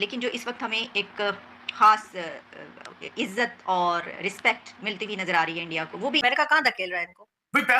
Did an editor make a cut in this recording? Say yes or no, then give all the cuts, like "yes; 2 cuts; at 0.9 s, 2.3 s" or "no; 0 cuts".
yes; 1 cut; at 6.2 s